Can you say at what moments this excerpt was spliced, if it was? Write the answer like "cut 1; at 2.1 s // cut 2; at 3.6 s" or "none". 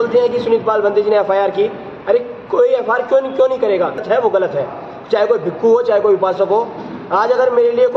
cut 1; at 4.0 s